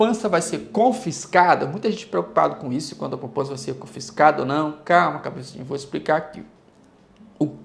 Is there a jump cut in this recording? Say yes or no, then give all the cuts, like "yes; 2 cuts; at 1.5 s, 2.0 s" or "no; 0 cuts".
no; 0 cuts